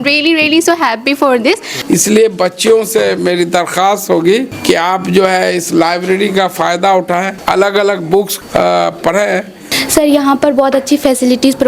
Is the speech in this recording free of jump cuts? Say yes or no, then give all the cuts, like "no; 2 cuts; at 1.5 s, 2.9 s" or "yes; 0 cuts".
no; 5 cuts; at 1.7 s, 4.5 s, 7.3 s, 8.4 s, 9.7 s